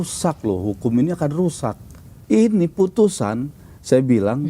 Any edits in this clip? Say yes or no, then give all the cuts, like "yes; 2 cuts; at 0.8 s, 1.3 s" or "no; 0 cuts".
yes; 1 cut; at 2.2 s